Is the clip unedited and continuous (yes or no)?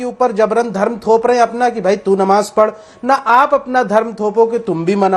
yes